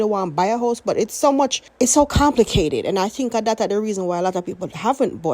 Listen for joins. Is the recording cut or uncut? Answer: cut